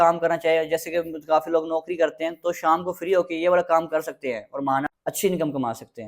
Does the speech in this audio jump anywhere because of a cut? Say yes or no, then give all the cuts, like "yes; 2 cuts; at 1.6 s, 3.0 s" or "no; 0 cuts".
yes; 1 cut; at 4.8 s